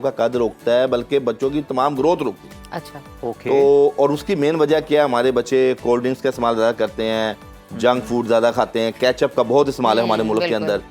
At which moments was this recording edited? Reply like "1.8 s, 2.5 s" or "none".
none